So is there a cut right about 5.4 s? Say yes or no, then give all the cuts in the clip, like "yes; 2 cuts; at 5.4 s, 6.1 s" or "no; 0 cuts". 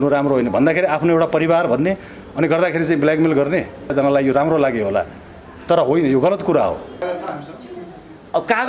no; 2 cuts; at 3.9 s, 6.9 s